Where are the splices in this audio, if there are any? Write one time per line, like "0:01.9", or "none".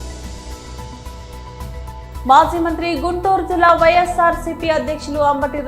0:01.0
0:02.2

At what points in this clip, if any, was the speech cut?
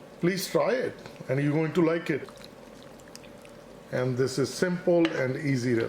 0:02.3

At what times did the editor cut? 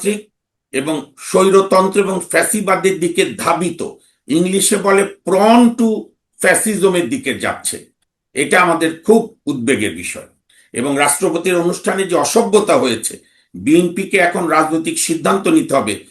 none

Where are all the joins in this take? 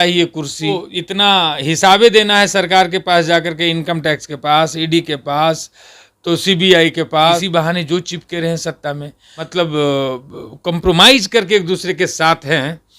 0:00.8
0:07.4
0:09.6

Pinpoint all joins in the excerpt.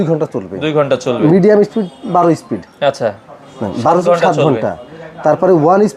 none

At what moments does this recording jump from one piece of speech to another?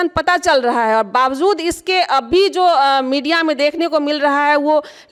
none

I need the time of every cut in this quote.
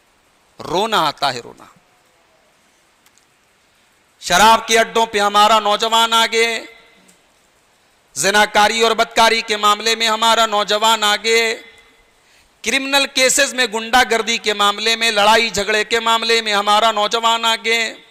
none

